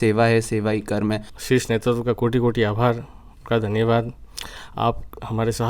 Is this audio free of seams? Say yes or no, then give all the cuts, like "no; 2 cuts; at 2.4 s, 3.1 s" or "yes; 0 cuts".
no; 1 cut; at 1.3 s